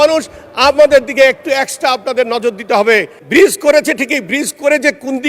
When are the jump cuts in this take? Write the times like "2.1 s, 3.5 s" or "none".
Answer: 3.2 s